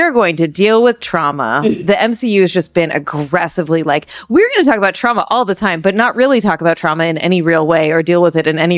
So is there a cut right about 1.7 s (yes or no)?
yes